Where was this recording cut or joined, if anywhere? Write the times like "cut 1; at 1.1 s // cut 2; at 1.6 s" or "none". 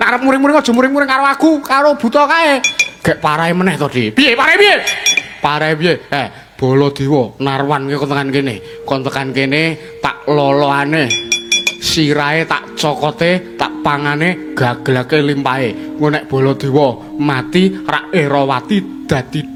none